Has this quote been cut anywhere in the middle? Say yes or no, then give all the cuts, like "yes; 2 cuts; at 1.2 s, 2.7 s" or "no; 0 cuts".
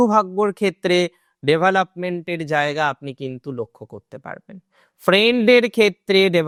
no; 0 cuts